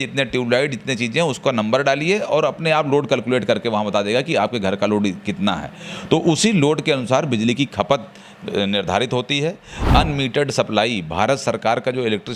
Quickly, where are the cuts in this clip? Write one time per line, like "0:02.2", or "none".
0:09.7